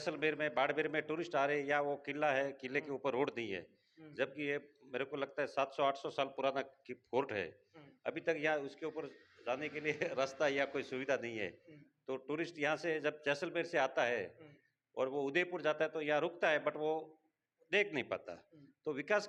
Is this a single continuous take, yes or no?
yes